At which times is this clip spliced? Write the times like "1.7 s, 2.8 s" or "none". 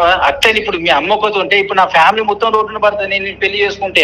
none